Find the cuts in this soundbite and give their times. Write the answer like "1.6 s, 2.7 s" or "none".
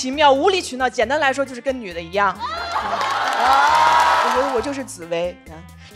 4.3 s